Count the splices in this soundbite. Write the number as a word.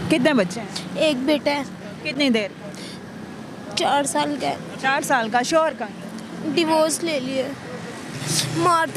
zero